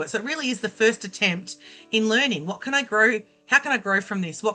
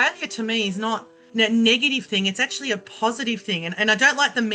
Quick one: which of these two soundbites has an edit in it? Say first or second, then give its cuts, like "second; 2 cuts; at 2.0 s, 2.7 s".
second; 1 cut; at 1.2 s